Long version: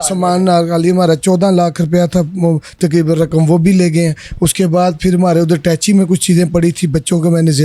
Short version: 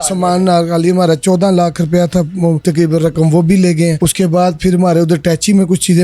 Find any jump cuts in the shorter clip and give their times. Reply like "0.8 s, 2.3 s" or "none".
2.6 s, 4.0 s